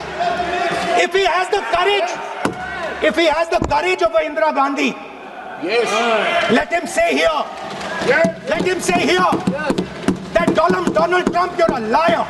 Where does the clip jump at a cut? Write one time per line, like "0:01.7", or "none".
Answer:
none